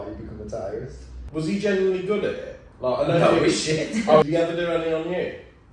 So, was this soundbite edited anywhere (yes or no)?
yes